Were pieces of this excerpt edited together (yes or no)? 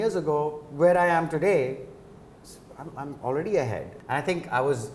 yes